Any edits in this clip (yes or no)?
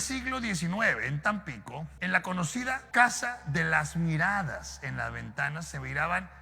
yes